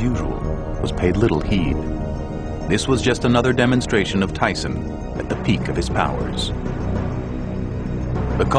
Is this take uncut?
yes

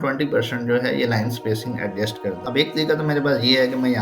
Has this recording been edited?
yes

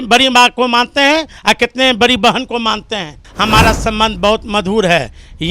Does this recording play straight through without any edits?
no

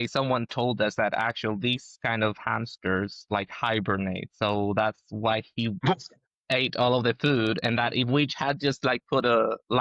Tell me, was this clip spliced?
no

